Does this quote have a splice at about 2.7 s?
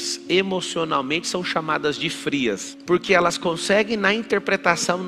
yes; 1 cut; at 2.7 s

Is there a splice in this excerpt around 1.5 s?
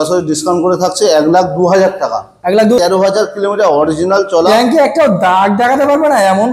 no; 1 cut; at 2.8 s

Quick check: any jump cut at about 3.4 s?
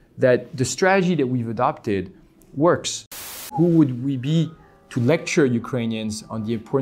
yes; 1 cut; at 3.4 s

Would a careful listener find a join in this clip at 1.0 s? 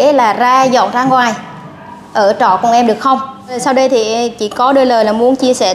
no; 1 cut; at 3.6 s

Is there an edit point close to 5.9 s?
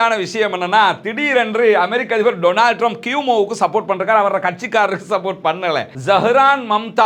yes; 1 cut; at 5.9 s

